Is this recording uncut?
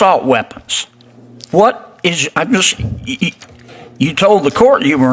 yes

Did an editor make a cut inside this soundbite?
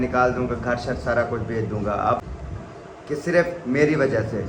yes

